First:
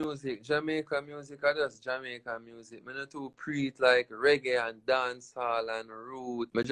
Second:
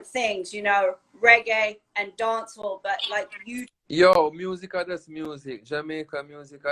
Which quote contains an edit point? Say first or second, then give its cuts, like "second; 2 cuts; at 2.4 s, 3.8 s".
second; 1 cut; at 3.8 s